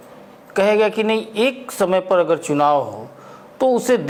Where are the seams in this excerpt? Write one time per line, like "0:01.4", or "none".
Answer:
none